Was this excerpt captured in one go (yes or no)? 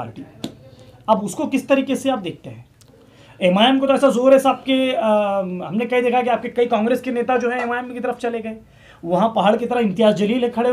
yes